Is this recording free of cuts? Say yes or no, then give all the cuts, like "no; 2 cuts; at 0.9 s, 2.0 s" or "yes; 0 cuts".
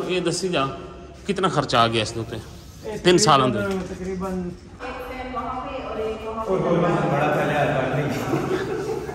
no; 1 cut; at 4.8 s